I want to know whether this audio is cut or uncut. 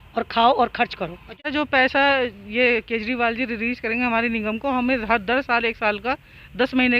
cut